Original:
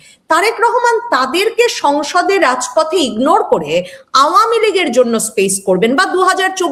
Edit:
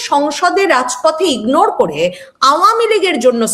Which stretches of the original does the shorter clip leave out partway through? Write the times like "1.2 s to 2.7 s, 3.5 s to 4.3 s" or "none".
none